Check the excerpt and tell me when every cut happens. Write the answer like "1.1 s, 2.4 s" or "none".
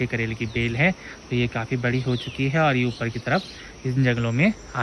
none